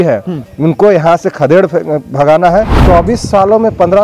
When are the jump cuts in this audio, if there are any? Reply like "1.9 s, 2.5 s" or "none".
2.8 s